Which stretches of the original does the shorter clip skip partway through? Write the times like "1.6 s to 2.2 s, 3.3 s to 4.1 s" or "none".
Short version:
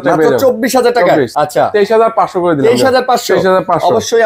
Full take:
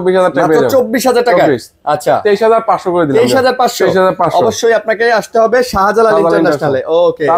1.6 s to 1.8 s